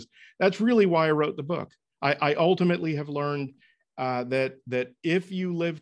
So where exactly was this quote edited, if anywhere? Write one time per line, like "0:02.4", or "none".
none